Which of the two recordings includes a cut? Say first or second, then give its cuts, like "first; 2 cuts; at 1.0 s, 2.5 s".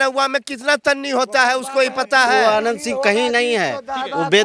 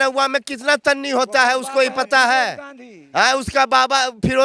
first; 1 cut; at 2.4 s